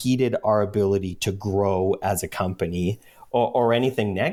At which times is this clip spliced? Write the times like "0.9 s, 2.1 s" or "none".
none